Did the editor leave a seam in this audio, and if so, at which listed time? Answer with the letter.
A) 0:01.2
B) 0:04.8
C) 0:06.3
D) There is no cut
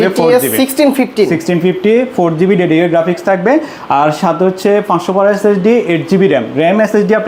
D